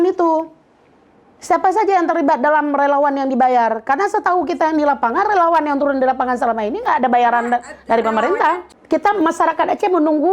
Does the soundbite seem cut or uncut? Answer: cut